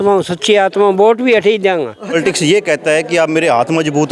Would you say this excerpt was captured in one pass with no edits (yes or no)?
no